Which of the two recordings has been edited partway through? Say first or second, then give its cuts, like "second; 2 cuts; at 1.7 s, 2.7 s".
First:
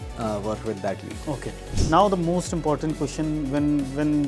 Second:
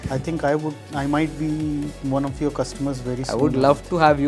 first; 1 cut; at 1.6 s